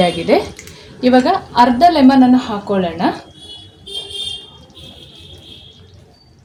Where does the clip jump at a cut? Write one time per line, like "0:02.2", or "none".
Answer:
none